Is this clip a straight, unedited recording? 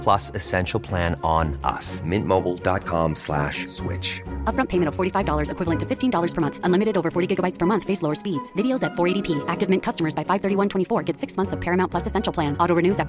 yes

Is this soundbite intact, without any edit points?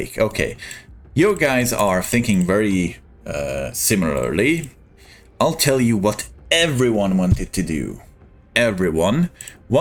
yes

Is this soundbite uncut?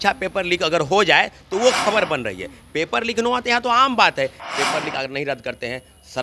no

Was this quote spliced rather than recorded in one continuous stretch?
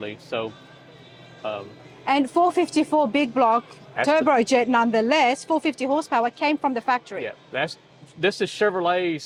no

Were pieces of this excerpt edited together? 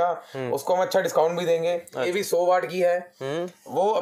yes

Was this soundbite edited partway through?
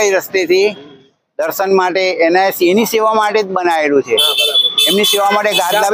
no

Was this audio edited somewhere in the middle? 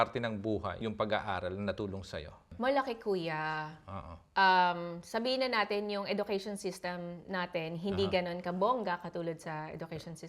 yes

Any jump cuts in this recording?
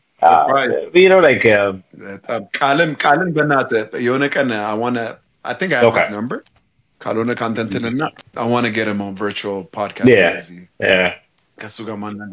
no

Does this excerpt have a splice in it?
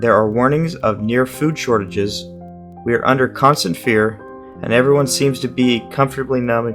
no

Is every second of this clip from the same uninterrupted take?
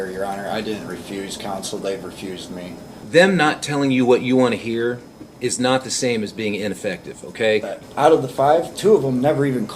no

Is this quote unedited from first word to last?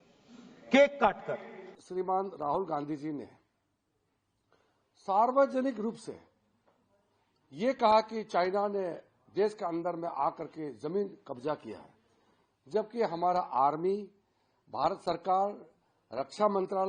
no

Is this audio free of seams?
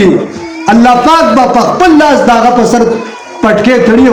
yes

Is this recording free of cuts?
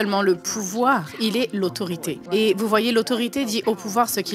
yes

